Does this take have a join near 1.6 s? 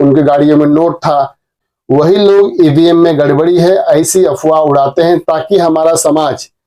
yes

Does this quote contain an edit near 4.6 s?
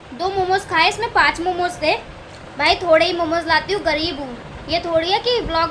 yes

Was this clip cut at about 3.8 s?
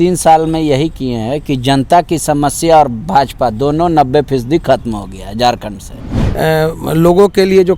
no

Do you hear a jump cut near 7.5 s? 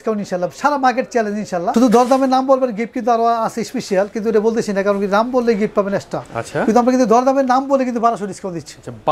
no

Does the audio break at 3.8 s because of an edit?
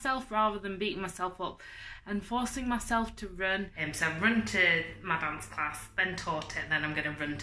yes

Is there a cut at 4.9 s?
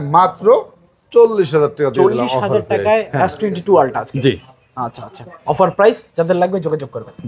no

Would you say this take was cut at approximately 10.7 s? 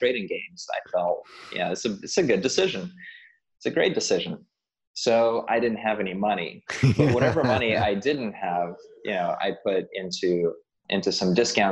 no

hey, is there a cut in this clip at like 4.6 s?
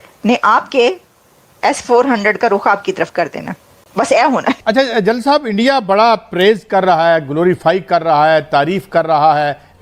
yes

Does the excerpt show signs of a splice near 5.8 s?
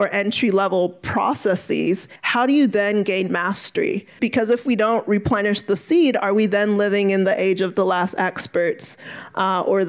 no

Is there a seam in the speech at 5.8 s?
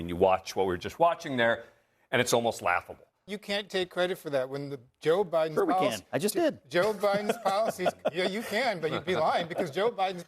no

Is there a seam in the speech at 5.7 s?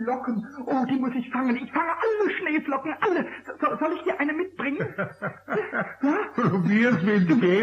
yes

